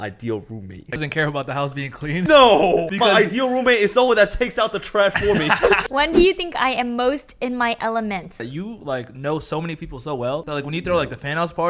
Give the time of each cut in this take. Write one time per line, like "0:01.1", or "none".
0:01.0
0:02.3
0:02.9
0:05.8
0:08.5
0:10.4

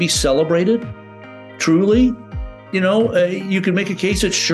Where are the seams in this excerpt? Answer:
none

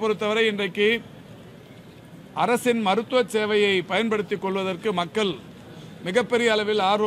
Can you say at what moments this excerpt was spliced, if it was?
none

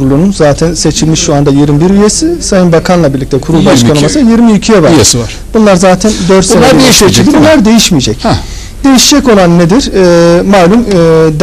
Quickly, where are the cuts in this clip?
none

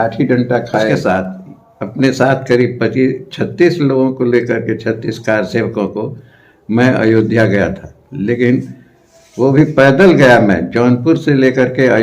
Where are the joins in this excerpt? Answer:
0:00.9

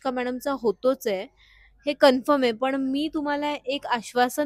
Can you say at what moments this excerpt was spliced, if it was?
none

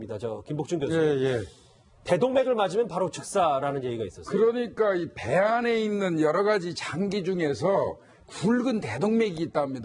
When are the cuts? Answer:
0:03.4

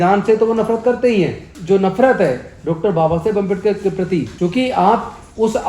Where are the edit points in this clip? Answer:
0:01.5
0:04.3

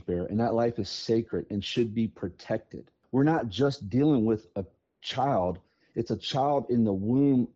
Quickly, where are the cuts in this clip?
0:03.0

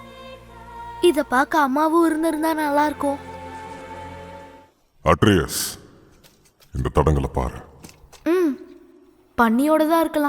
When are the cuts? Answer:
0:04.5

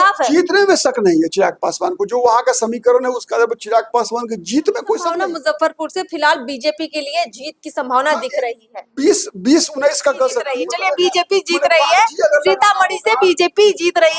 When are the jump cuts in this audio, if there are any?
0:05.1
0:10.7

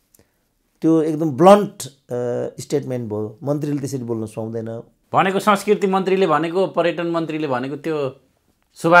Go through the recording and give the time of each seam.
0:04.9

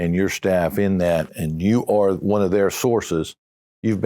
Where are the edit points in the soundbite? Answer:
0:01.3

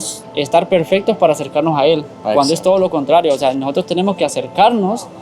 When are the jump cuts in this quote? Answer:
none

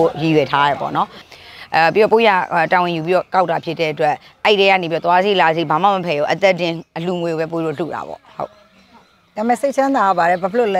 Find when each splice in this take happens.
0:01.3

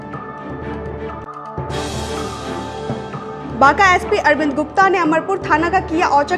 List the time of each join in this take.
0:03.4

